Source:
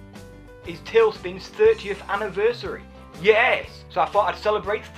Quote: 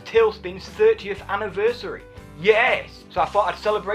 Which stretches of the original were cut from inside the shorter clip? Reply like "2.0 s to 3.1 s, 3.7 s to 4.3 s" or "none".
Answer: none